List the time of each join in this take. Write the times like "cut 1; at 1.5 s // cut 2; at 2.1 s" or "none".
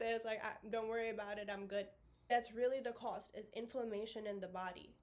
cut 1; at 2.3 s